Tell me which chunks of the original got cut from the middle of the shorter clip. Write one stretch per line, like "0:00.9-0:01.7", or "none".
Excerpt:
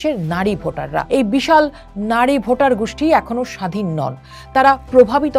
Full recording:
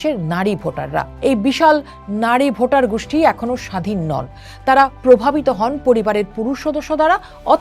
0:01.1-0:01.2